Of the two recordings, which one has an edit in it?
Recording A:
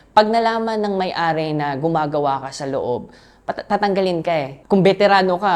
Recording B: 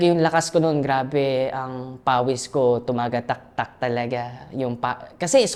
A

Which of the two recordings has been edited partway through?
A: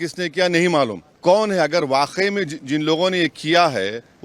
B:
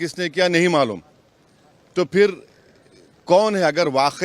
A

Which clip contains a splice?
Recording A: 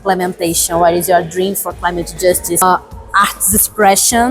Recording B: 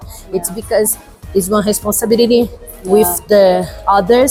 A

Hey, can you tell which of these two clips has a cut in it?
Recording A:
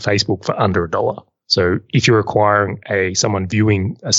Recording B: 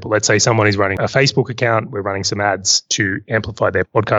B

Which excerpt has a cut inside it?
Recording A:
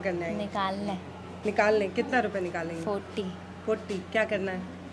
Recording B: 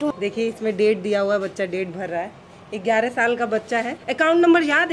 B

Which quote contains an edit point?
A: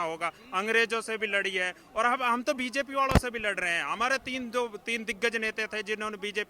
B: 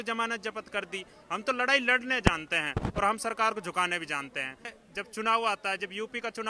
B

